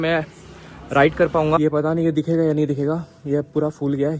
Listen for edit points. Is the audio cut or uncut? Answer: cut